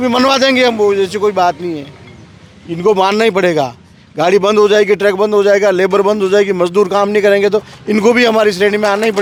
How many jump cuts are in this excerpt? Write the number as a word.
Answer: zero